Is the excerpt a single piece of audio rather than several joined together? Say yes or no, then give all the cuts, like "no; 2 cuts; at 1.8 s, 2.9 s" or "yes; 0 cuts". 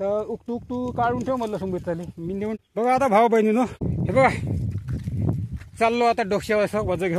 no; 2 cuts; at 2.6 s, 3.8 s